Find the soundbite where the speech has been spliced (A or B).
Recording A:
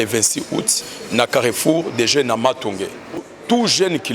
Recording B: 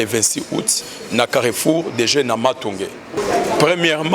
A